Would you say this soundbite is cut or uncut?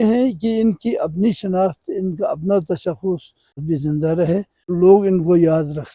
cut